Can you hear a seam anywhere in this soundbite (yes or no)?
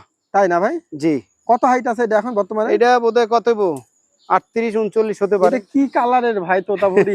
yes